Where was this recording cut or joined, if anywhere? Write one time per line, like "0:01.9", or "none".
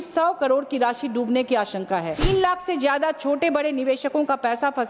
0:02.2